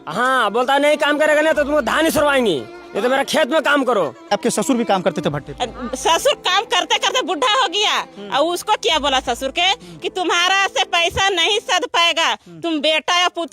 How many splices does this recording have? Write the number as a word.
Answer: one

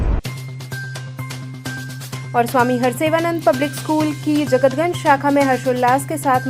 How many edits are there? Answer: zero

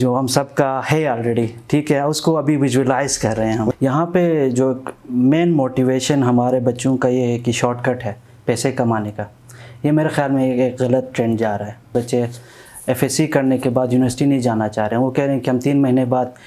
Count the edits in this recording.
two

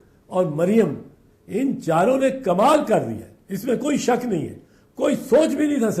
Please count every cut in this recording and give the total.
zero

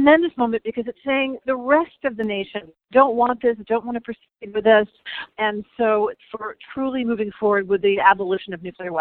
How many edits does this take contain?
zero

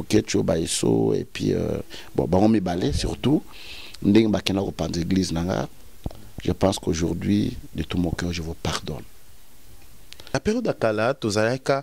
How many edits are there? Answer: one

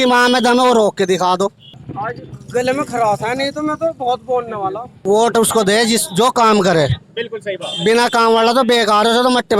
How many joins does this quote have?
two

